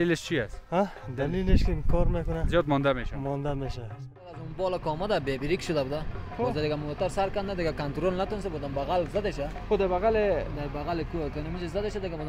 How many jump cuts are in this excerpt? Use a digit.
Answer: 1